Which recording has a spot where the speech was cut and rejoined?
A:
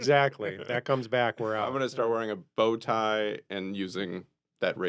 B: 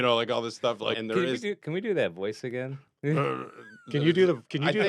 B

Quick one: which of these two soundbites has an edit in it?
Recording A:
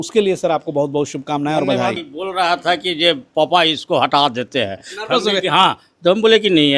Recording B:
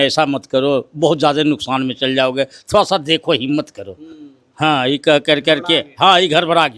A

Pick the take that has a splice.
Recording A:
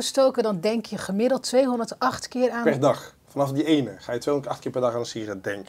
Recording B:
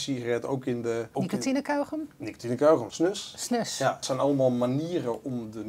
B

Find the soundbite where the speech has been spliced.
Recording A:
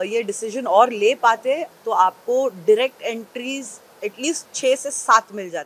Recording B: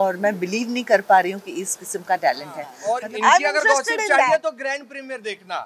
B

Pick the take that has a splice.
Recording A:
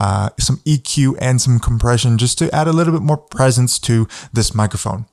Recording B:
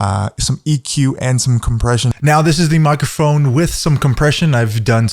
B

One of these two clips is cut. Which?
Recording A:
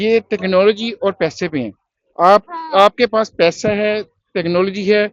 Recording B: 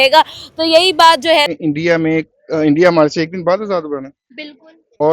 B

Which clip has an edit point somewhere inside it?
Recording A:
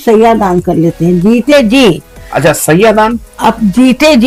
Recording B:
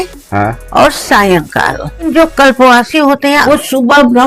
B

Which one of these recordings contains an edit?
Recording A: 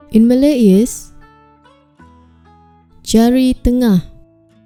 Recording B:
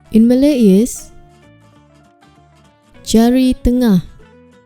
B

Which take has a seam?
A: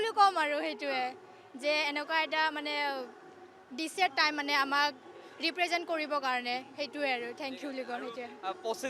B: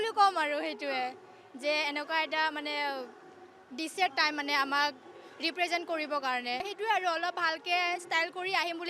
B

